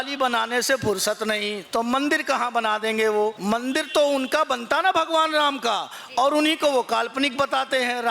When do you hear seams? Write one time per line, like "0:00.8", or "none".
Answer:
0:03.4